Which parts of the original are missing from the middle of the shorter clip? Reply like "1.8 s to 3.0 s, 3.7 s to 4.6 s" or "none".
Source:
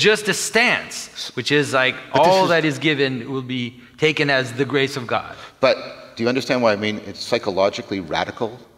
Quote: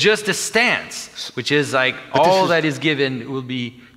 none